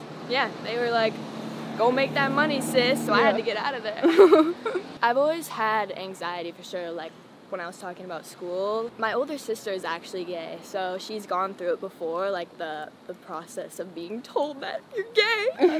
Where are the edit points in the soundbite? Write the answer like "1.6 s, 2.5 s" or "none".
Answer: 4.9 s, 8.9 s